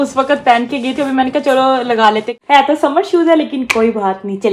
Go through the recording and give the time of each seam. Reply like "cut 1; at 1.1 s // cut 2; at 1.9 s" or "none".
cut 1; at 2.3 s